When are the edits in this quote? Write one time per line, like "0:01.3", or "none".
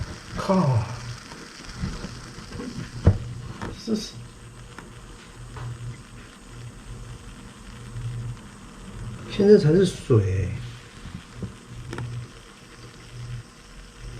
0:11.9